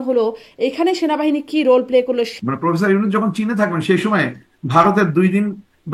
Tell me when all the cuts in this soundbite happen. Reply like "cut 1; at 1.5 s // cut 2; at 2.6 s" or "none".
cut 1; at 2.3 s